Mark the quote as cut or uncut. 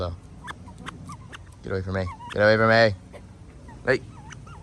uncut